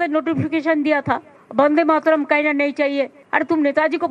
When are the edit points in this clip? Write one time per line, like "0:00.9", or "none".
0:03.2

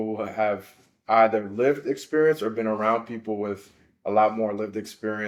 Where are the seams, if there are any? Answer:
none

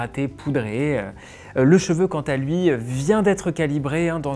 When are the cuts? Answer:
none

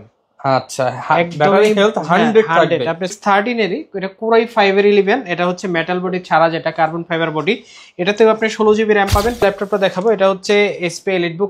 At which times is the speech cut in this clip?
0:03.1
0:09.4

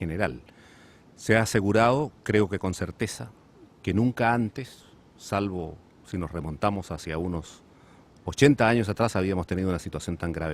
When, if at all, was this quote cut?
0:09.1

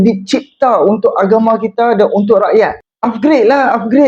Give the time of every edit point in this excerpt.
0:02.9

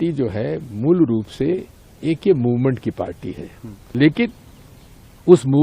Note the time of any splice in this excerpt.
0:03.9

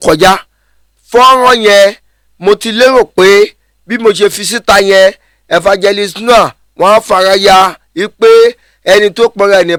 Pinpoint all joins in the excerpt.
none

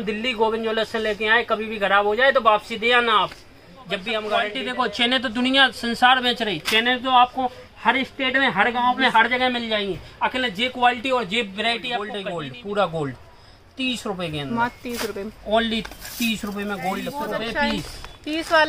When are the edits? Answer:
0:04.6
0:12.1
0:17.1

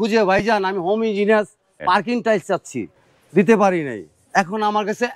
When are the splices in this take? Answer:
0:01.8
0:02.9

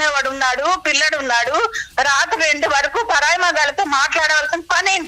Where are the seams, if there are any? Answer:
none

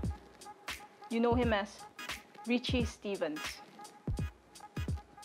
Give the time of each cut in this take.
none

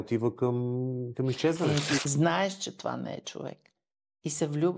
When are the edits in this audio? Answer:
0:02.0

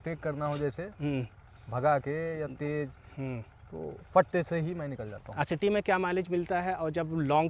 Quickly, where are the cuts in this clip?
0:05.5

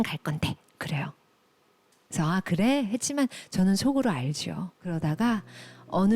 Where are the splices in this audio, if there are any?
0:04.8

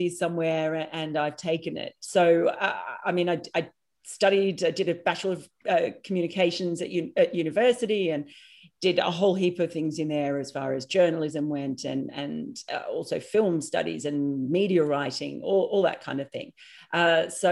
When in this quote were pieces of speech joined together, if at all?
none

